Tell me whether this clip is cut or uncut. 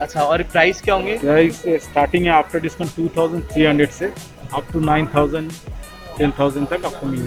uncut